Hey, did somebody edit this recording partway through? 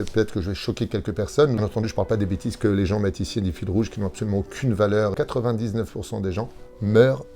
yes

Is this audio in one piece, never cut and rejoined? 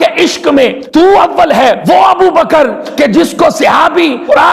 no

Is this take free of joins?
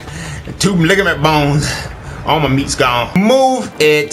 no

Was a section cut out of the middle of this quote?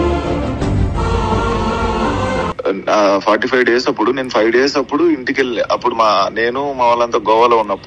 yes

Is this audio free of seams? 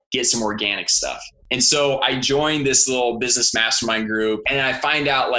no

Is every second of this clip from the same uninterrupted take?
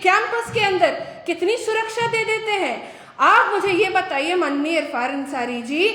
yes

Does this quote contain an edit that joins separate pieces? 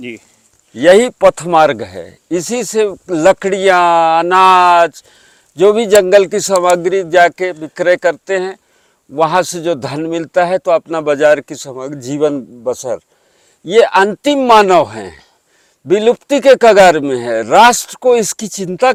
no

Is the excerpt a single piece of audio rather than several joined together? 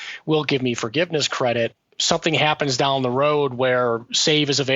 no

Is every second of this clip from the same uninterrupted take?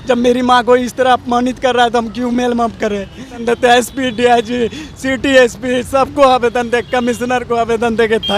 no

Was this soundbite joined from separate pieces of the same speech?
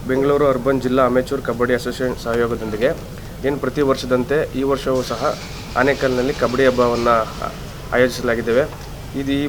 no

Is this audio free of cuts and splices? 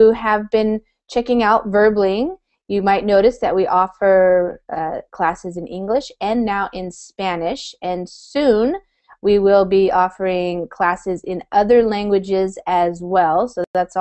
yes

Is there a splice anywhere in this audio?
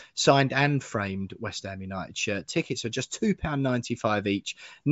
no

